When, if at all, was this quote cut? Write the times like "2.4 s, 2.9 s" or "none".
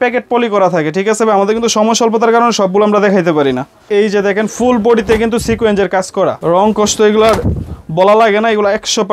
3.8 s, 6.4 s